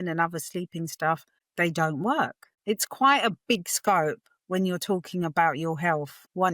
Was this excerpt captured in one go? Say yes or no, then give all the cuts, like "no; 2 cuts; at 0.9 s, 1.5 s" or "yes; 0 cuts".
no; 1 cut; at 2.5 s